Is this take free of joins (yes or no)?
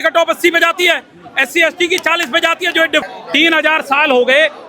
no